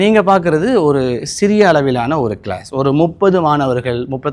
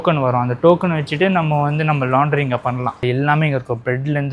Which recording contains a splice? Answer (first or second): second